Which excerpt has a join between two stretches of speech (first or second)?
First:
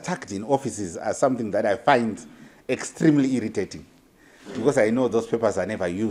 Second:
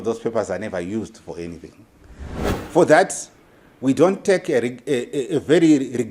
second